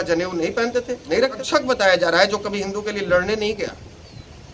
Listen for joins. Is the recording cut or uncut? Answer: cut